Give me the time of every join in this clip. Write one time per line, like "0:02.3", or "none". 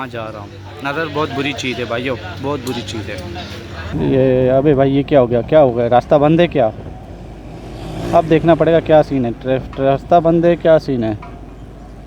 0:03.9